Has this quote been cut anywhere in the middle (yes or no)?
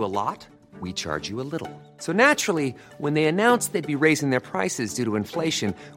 no